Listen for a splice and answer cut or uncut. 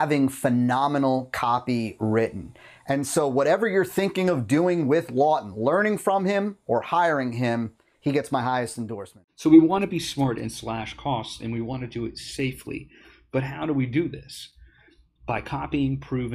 cut